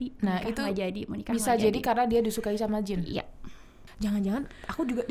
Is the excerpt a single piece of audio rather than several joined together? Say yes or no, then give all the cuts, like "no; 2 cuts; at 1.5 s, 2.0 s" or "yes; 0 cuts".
no; 1 cut; at 3.9 s